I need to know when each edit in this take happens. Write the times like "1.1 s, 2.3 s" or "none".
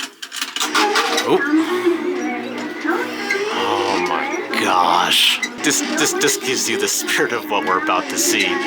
5.6 s